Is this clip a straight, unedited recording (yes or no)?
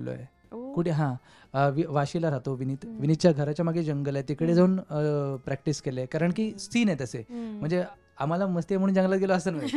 yes